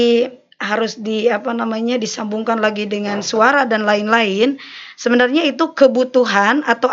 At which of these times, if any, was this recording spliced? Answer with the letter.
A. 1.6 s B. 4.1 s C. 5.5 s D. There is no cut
D